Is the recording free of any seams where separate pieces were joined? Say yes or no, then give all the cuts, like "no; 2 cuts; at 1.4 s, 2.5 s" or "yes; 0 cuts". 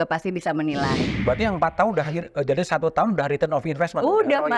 no; 1 cut; at 1.1 s